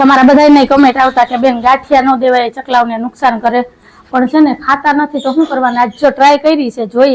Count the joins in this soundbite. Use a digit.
0